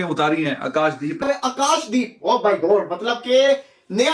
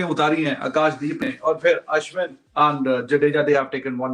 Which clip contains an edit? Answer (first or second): first